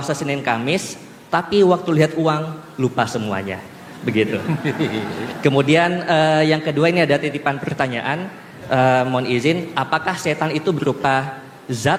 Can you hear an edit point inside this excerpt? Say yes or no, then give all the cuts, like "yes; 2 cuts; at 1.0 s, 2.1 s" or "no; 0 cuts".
no; 0 cuts